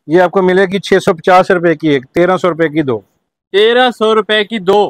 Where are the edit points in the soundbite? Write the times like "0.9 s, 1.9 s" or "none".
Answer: none